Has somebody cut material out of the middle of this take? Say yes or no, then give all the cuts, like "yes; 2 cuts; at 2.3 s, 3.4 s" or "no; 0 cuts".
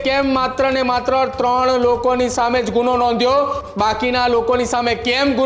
no; 0 cuts